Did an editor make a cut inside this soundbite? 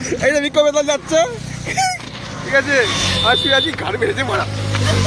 no; 0 cuts

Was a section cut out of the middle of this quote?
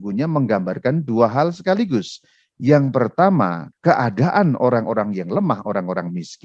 yes; 1 cut; at 3.6 s

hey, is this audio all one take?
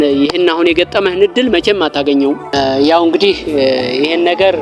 no; 1 cut; at 2.5 s

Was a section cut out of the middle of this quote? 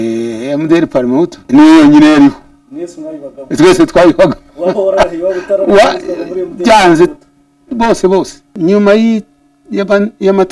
yes; 2 cuts; at 1.4 s, 8.5 s

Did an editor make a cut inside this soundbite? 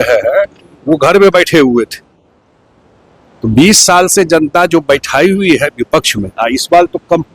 no; 0 cuts

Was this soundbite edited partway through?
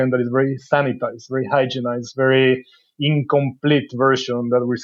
no; 0 cuts

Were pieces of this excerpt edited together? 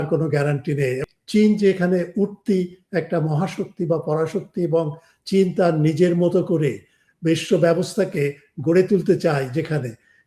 yes; 1 cut; at 1.0 s

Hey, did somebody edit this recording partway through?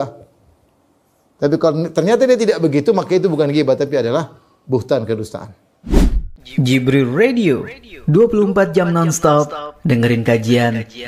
yes; 1 cut; at 5.7 s

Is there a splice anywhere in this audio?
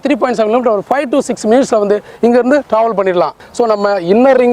yes; 1 cut; at 3.4 s

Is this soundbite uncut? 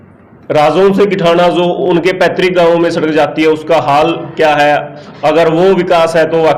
yes; 0 cuts

